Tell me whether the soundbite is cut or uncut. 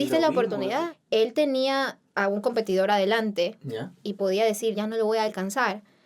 cut